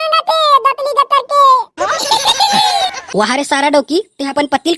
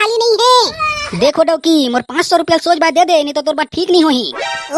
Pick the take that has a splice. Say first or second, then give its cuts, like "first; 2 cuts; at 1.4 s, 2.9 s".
first; 1 cut; at 2.9 s